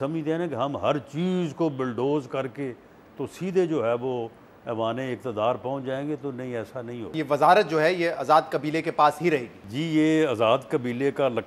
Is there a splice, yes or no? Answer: yes